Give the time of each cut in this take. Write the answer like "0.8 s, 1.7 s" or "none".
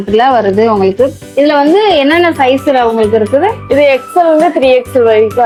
none